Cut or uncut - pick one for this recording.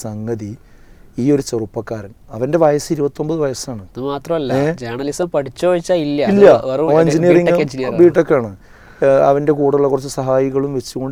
uncut